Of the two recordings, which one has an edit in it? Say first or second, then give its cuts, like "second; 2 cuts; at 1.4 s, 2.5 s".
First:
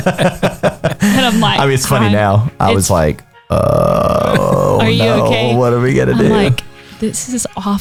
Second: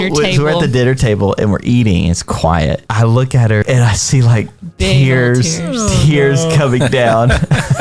second; 1 cut; at 3.6 s